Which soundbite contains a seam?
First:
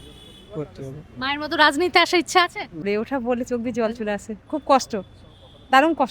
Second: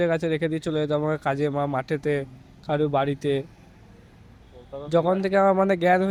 first; 1 cut; at 2.8 s

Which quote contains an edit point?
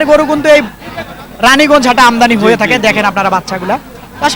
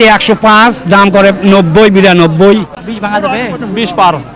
second; 1 cut; at 2.8 s

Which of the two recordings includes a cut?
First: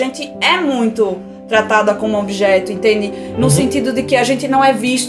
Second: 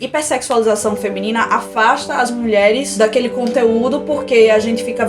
second; 1 cut; at 2.9 s

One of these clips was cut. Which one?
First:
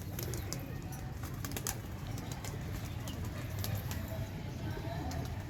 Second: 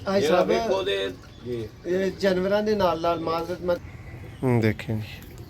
second; 1 cut; at 3.8 s

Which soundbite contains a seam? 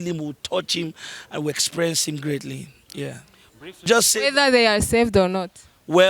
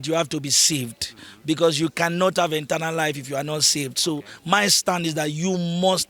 first; 1 cut; at 3.9 s

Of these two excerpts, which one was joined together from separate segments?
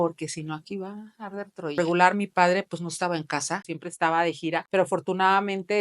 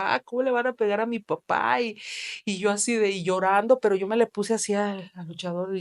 first; 3 cuts; at 1.8 s, 3.7 s, 4.6 s

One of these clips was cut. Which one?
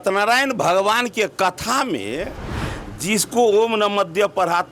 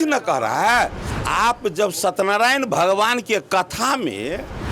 second; 1 cut; at 1.1 s

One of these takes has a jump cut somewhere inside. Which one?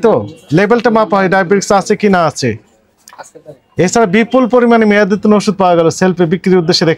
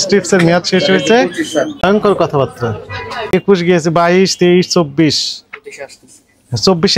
second; 2 cuts; at 1.7 s, 3.3 s

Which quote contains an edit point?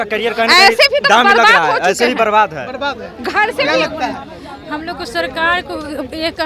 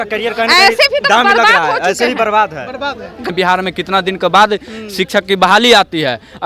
second; 1 cut; at 3.3 s

